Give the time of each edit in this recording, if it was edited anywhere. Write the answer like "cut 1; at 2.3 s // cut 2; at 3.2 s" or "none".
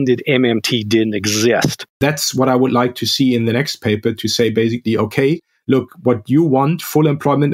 cut 1; at 2.0 s